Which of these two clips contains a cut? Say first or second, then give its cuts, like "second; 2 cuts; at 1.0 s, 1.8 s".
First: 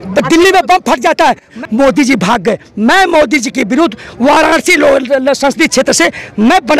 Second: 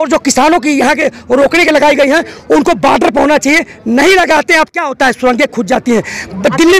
first; 1 cut; at 1.5 s